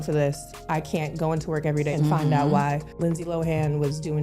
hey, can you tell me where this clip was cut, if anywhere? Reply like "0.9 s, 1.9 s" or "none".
1.9 s, 2.9 s